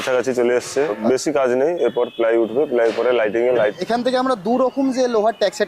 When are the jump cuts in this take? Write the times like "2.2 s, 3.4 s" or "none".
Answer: 1.0 s, 3.7 s